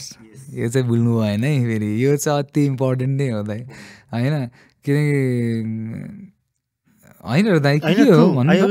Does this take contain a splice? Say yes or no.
no